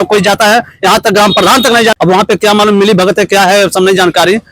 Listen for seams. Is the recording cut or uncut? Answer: cut